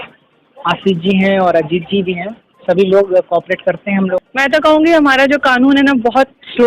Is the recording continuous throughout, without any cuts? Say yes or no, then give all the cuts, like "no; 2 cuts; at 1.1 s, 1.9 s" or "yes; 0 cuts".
no; 1 cut; at 4.2 s